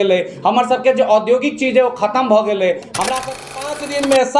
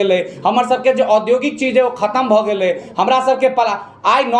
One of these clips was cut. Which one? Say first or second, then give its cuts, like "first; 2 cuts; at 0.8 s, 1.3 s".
first; 1 cut; at 3.4 s